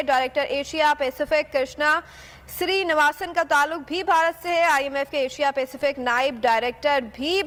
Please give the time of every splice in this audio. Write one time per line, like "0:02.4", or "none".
none